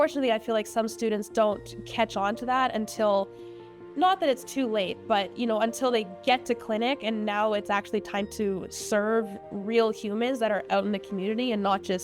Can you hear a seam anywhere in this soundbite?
no; 0 cuts

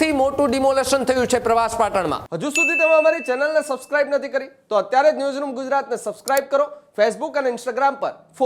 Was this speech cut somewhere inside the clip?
yes; 1 cut; at 2.3 s

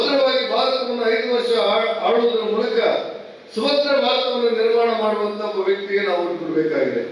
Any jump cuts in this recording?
no; 0 cuts

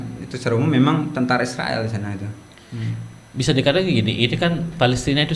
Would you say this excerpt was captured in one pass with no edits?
yes; 0 cuts

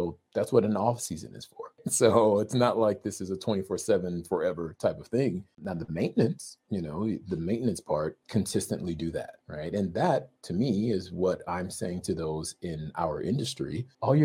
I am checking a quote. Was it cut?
no; 0 cuts

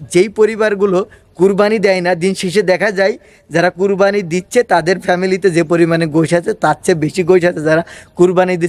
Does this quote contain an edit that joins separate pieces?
no; 0 cuts

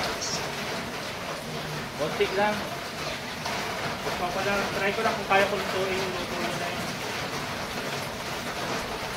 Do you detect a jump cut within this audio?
no; 0 cuts

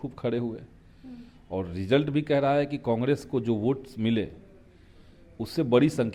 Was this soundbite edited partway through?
no; 0 cuts

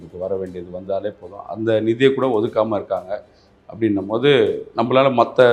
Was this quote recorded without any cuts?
yes; 0 cuts

